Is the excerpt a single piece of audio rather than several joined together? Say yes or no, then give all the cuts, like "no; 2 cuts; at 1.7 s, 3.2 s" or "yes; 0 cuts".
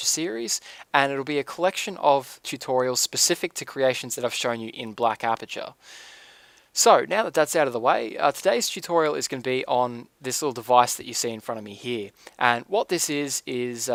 yes; 0 cuts